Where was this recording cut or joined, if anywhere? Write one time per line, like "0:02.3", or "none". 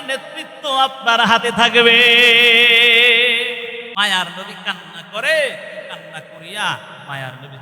0:03.9